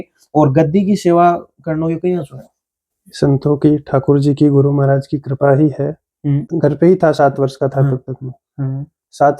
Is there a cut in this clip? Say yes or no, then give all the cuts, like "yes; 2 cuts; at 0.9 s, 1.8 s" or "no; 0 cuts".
yes; 1 cut; at 6.5 s